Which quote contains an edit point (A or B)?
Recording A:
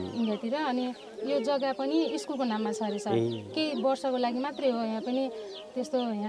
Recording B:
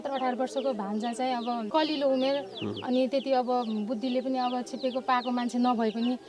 B